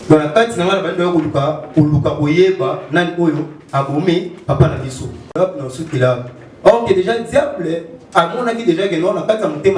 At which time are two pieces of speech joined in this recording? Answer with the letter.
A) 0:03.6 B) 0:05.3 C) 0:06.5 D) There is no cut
B